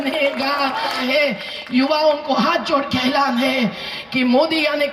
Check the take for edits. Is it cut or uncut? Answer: cut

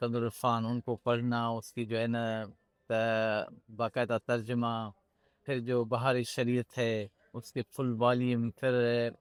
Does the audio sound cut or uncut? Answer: uncut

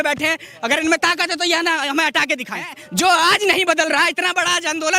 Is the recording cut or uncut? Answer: cut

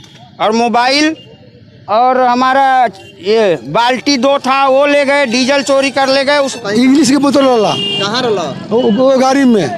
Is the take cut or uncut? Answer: cut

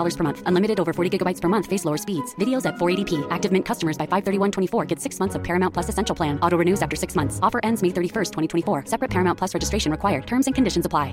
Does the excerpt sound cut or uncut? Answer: uncut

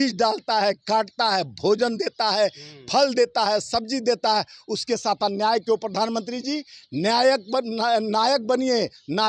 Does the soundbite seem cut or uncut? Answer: uncut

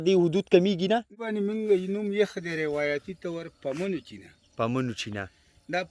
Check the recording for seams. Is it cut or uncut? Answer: cut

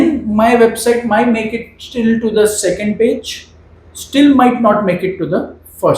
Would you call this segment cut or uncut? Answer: uncut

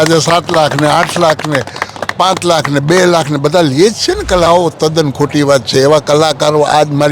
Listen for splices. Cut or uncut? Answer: cut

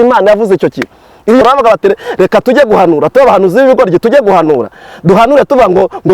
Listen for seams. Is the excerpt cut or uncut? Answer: cut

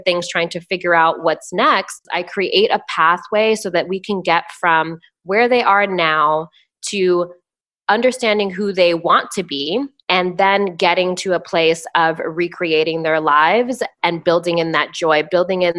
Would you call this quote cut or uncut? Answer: cut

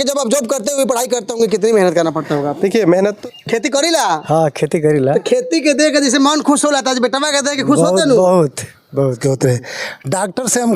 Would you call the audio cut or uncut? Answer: cut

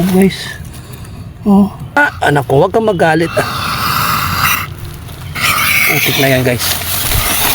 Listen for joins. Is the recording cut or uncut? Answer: cut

